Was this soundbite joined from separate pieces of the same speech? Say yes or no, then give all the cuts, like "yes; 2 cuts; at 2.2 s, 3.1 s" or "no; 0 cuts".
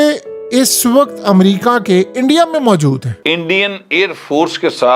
yes; 1 cut; at 3.1 s